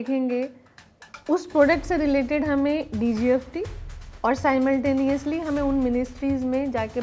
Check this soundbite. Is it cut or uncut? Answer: uncut